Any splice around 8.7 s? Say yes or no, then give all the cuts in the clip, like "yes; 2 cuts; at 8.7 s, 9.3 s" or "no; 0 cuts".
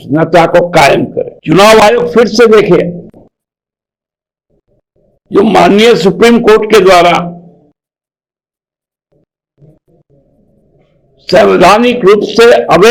no; 1 cut; at 1.3 s